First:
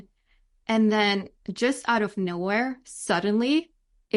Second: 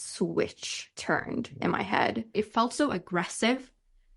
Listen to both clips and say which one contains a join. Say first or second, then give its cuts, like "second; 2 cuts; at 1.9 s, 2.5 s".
second; 1 cut; at 2.3 s